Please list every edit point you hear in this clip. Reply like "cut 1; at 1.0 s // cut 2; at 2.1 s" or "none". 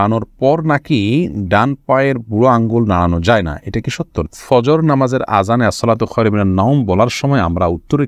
cut 1; at 4.2 s